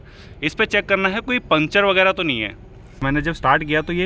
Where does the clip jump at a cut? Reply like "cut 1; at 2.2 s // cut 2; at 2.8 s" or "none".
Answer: cut 1; at 3.0 s